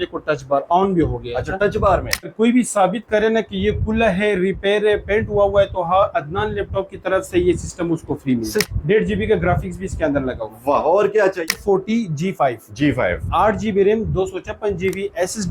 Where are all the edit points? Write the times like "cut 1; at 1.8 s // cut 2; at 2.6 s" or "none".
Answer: cut 1; at 2.3 s // cut 2; at 8.7 s // cut 3; at 11.6 s

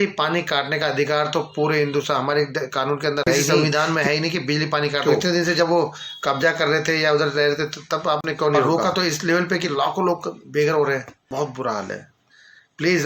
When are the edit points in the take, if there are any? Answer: cut 1; at 3.5 s // cut 2; at 5.0 s // cut 3; at 8.6 s // cut 4; at 11.2 s

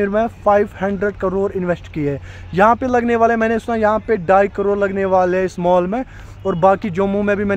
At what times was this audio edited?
none

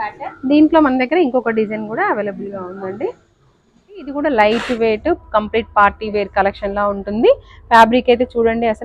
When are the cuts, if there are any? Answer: cut 1; at 4.2 s

